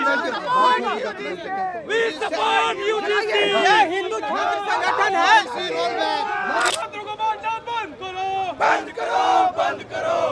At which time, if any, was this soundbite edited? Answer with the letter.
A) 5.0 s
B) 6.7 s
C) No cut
B